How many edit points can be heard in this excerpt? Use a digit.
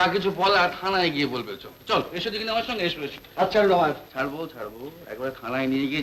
0